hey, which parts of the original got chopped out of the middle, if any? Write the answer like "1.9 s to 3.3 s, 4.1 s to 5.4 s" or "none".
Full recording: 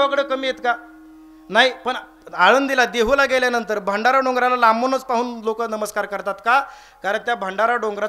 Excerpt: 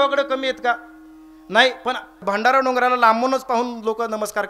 2.2 s to 3.8 s